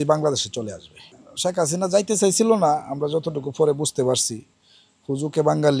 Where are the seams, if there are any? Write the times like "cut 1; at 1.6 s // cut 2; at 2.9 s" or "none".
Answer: cut 1; at 1.1 s